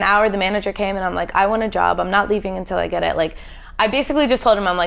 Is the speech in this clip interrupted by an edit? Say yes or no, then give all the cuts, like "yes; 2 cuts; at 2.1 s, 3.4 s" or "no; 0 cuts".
no; 0 cuts